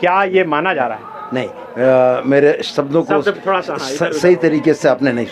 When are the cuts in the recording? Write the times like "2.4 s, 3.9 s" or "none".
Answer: none